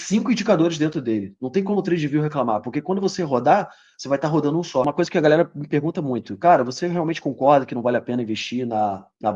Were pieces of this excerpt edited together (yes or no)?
yes